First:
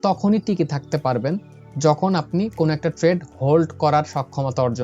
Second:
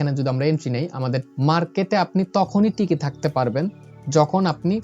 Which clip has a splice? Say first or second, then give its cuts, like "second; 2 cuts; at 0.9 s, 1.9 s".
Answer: second; 1 cut; at 1.3 s